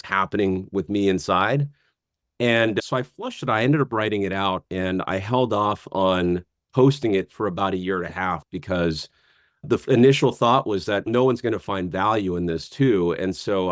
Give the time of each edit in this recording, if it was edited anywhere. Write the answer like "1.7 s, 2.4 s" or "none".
none